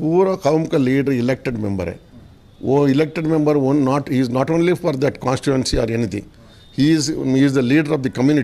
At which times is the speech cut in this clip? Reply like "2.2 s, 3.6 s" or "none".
none